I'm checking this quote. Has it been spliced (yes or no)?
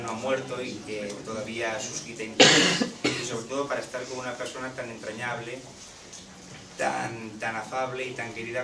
no